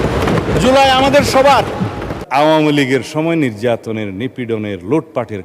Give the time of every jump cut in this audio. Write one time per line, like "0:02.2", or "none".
0:02.2